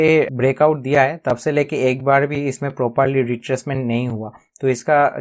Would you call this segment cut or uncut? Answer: uncut